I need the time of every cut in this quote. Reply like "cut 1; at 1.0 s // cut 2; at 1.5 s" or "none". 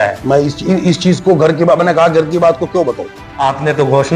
none